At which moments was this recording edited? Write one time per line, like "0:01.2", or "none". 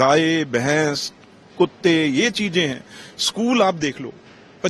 none